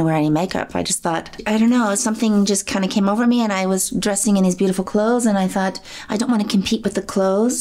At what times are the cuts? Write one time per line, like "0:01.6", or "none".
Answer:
none

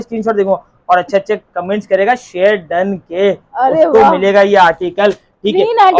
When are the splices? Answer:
none

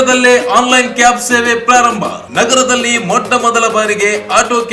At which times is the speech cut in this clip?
none

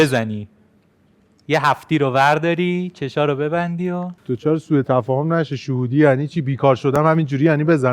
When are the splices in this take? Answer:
0:04.1

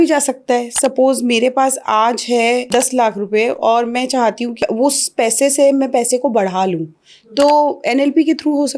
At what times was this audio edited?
0:02.7
0:04.6

